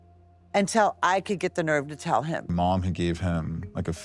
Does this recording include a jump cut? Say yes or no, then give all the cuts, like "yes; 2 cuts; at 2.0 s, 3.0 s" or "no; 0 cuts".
yes; 1 cut; at 2.5 s